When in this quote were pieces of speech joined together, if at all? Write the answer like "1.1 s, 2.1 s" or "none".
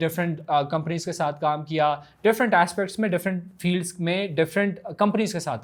none